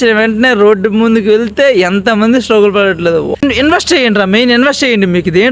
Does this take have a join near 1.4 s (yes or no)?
no